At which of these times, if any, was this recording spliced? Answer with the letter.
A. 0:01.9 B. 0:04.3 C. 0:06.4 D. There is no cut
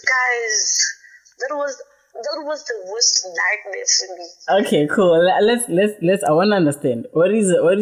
D